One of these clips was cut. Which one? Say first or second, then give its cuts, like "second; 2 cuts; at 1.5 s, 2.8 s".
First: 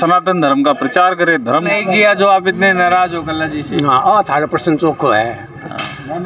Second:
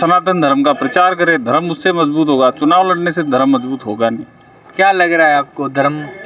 first; 1 cut; at 1.7 s